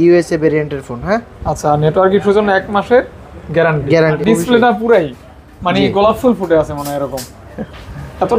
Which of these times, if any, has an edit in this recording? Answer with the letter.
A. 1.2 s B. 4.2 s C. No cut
B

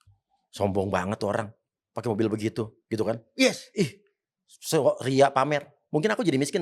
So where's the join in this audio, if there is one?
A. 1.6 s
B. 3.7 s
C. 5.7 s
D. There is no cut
D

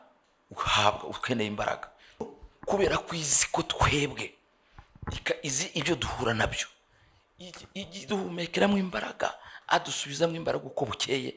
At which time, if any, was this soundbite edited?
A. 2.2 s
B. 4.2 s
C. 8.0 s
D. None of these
A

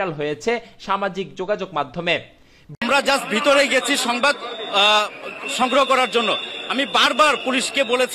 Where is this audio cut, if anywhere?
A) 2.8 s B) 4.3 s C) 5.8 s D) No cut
A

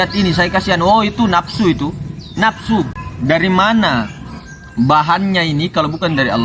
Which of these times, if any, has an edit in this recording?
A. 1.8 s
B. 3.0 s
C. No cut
B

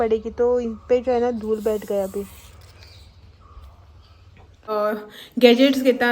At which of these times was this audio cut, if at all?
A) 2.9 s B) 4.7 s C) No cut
B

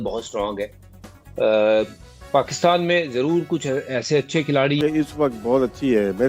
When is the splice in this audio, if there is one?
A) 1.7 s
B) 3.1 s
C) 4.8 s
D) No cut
C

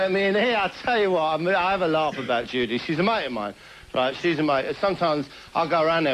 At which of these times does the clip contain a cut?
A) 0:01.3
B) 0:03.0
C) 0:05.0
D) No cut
A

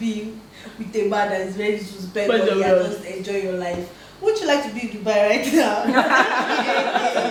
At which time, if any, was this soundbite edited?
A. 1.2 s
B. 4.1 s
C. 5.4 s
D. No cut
D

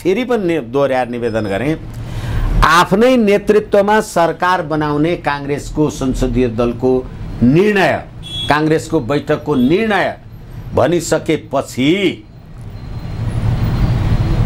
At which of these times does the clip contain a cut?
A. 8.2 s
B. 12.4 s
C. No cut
C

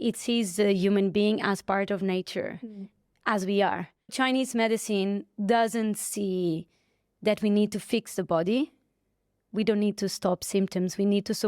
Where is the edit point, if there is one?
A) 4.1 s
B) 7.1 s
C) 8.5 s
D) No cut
A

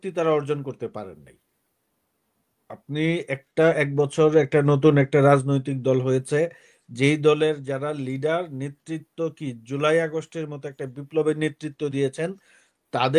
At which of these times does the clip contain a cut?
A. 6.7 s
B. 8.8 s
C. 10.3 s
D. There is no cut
D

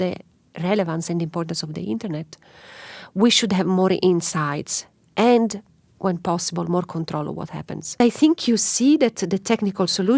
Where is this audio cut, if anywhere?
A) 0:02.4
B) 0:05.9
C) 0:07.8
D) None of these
C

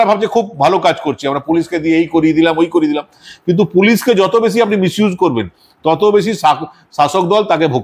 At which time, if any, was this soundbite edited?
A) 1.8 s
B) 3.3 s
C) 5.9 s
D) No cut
D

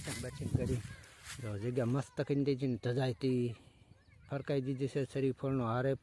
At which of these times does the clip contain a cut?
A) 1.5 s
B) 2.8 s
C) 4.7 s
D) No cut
D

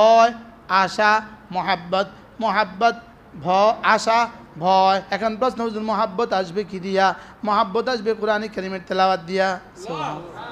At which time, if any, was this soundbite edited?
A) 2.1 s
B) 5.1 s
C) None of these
B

